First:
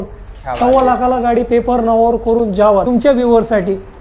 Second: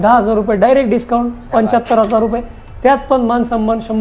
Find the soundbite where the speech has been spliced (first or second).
first